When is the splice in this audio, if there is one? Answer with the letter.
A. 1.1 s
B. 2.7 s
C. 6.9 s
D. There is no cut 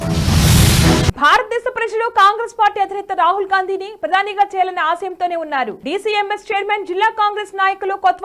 A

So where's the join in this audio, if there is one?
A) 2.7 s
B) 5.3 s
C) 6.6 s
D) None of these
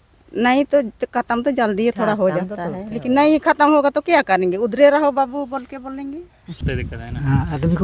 C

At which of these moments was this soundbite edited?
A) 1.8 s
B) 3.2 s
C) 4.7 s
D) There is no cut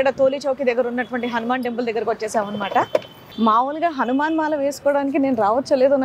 B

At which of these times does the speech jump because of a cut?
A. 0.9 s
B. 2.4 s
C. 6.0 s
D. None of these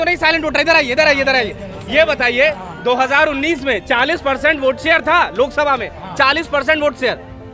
D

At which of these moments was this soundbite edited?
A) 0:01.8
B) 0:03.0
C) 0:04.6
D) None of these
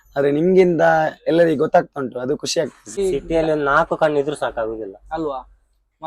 B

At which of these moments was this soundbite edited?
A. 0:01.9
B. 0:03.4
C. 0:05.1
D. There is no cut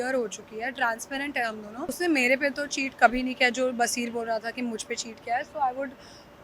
A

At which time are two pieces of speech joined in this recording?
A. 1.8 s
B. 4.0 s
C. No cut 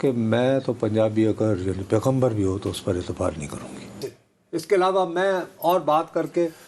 B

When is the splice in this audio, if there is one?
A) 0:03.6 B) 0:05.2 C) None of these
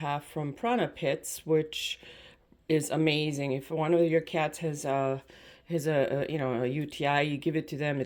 C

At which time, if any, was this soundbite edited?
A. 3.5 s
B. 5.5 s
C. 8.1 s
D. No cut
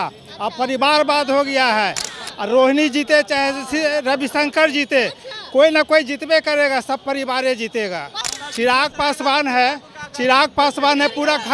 C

